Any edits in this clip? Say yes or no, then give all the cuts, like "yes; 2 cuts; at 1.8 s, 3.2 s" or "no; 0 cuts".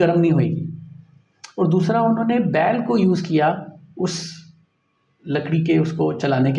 no; 0 cuts